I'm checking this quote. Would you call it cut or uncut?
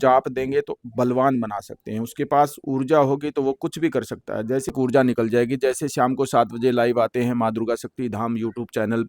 cut